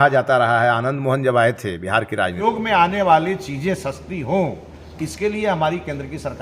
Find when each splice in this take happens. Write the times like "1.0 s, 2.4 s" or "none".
2.4 s